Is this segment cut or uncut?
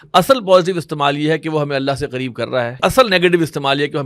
cut